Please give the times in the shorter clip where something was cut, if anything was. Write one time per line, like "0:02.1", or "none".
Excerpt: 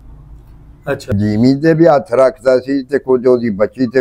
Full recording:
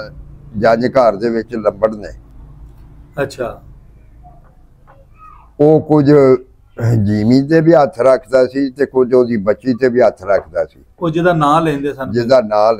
0:01.1